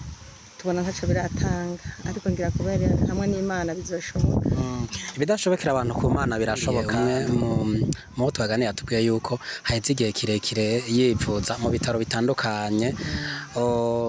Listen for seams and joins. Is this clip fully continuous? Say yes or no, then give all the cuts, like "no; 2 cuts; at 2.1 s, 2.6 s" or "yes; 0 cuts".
no; 1 cut; at 6.9 s